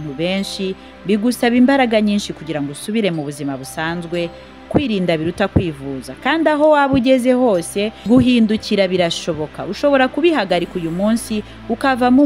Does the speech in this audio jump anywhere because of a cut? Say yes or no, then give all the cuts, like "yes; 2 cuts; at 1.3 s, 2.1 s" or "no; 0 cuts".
yes; 2 cuts; at 4.7 s, 8.0 s